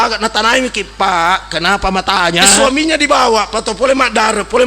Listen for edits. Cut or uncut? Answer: cut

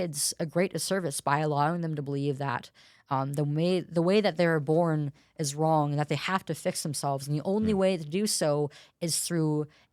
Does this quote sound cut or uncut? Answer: uncut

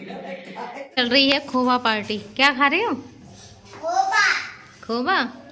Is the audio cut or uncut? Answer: cut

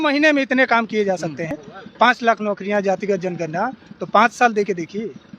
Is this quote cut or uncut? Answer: cut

